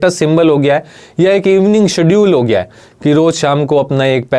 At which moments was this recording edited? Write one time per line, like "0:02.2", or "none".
none